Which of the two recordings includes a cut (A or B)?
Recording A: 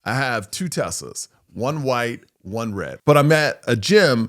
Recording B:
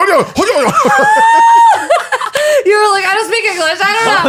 A